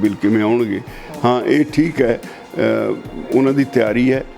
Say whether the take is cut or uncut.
uncut